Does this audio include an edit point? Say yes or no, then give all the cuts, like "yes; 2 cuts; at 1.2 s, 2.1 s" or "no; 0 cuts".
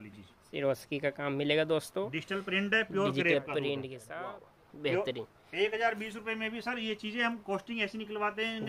yes; 1 cut; at 4.0 s